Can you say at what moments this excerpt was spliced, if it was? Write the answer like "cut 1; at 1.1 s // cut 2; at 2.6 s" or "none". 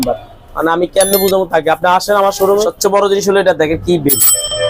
cut 1; at 2.7 s

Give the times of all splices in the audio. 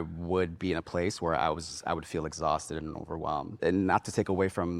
cut 1; at 3.5 s

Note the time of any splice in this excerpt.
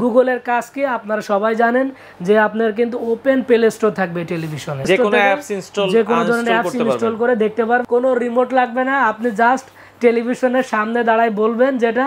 cut 1; at 4.9 s // cut 2; at 7.8 s

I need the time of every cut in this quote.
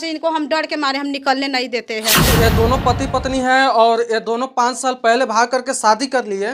cut 1; at 2.2 s

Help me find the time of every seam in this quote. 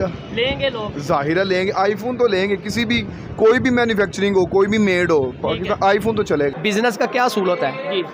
cut 1; at 6.6 s

